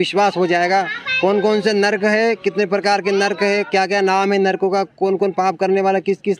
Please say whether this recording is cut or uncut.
uncut